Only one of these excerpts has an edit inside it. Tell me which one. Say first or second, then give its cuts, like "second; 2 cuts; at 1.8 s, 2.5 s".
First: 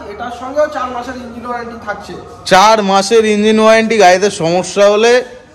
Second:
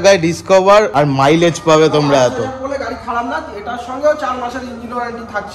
second; 1 cut; at 0.9 s